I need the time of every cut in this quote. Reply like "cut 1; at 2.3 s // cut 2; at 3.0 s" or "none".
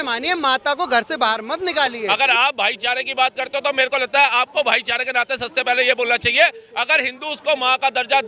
cut 1; at 2.0 s